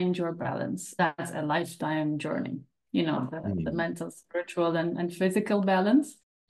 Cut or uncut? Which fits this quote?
cut